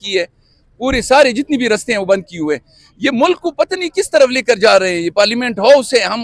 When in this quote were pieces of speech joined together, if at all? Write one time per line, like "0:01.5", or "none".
none